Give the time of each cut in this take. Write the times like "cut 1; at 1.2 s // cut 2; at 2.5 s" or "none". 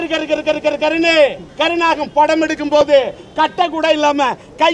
cut 1; at 1.5 s